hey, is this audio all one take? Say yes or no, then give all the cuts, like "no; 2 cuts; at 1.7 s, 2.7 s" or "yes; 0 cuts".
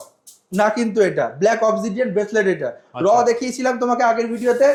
yes; 0 cuts